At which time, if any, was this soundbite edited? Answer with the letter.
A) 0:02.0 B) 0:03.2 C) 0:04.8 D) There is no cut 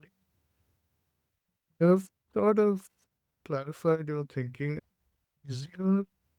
C